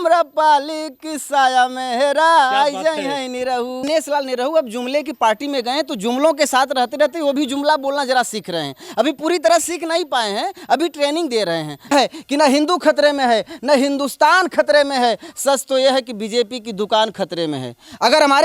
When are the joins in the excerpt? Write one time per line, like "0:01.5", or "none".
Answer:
0:03.8
0:11.9